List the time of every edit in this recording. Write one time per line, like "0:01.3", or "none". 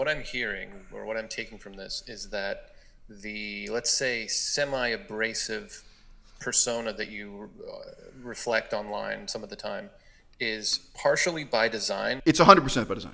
0:12.2